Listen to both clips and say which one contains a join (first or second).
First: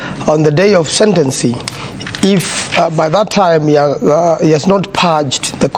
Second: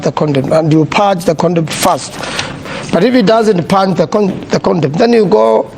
second